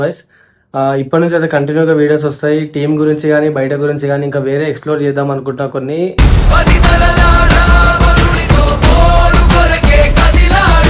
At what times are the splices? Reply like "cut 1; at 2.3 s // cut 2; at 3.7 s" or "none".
none